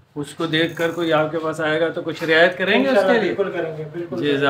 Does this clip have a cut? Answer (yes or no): no